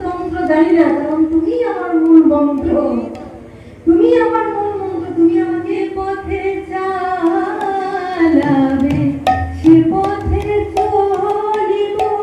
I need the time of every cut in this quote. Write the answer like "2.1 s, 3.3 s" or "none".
5.7 s